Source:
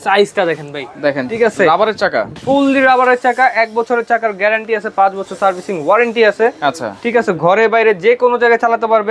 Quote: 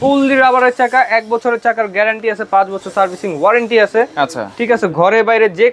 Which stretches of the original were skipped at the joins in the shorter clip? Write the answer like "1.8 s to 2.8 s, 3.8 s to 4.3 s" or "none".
none